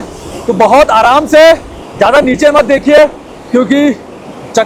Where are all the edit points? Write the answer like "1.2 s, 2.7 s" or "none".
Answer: none